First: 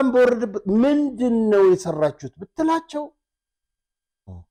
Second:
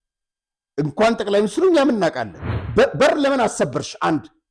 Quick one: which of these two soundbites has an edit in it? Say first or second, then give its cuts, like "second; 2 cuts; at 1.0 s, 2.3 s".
second; 1 cut; at 2.6 s